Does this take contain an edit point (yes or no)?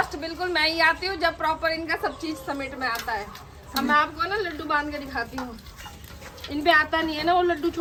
no